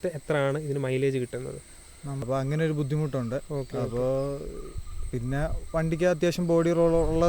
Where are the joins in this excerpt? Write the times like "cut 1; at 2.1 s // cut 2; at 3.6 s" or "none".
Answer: cut 1; at 2.1 s

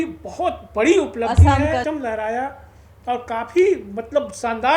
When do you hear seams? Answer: cut 1; at 1.8 s

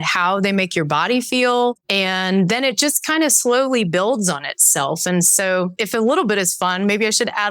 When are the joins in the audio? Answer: cut 1; at 1.8 s // cut 2; at 5.8 s

